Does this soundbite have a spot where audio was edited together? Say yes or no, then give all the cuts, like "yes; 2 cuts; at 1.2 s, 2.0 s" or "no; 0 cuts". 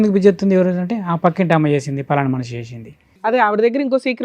yes; 1 cut; at 3.3 s